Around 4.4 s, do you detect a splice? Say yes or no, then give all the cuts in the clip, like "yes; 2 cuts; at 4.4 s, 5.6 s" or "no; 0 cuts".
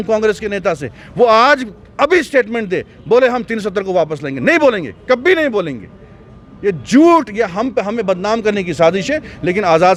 no; 0 cuts